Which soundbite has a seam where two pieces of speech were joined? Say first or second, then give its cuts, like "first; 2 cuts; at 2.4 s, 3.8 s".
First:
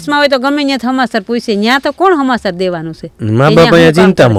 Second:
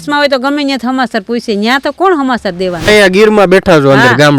second; 1 cut; at 2.9 s